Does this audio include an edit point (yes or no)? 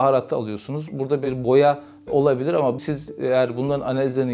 no